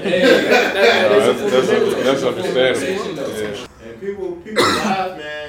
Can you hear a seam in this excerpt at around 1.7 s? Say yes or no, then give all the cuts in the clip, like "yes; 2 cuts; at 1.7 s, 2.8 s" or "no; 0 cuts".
no; 1 cut; at 3.6 s